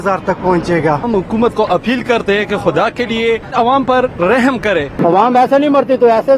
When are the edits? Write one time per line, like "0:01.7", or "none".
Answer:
0:01.0
0:03.5
0:05.0